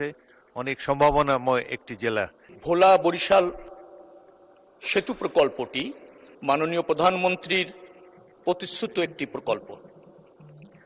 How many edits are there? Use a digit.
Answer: 1